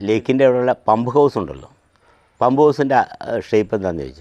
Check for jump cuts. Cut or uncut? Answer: uncut